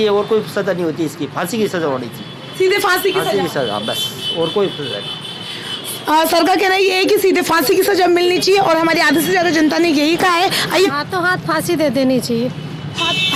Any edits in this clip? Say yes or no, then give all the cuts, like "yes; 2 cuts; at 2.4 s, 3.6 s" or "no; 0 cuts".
no; 0 cuts